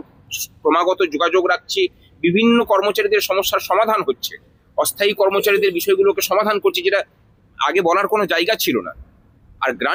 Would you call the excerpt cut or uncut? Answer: uncut